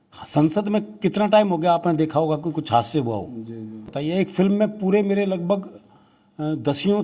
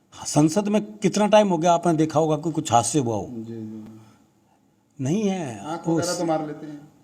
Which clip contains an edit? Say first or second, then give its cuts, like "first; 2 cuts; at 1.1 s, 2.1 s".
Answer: first; 1 cut; at 3.9 s